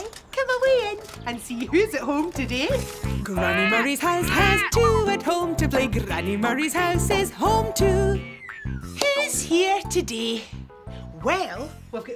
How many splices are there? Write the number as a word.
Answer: one